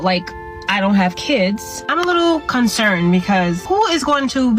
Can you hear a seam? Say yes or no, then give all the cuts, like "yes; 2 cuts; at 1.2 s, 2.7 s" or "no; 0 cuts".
yes; 2 cuts; at 1.8 s, 3.6 s